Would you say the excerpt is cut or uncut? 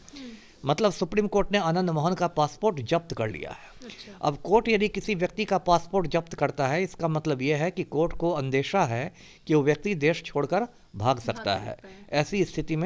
uncut